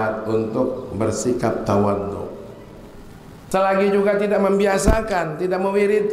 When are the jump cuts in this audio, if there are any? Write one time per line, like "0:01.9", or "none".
0:03.5